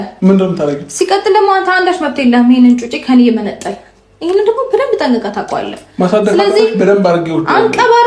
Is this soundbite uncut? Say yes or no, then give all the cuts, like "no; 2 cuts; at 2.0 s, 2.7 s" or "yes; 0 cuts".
yes; 0 cuts